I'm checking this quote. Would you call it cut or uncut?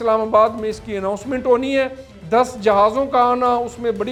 uncut